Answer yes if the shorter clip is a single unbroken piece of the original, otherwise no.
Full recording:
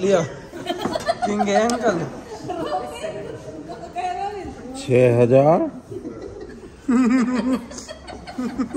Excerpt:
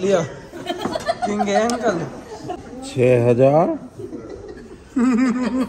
no